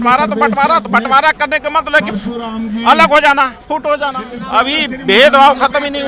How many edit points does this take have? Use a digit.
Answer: 1